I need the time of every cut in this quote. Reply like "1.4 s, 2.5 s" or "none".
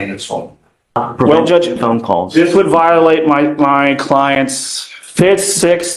1.0 s